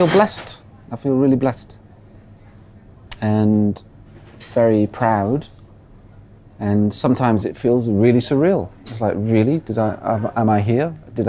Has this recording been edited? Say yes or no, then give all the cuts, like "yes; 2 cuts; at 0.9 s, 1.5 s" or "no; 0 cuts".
no; 0 cuts